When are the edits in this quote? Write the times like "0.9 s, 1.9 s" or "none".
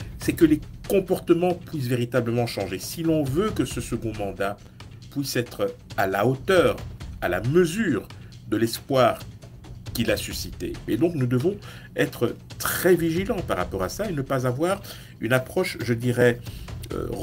10.8 s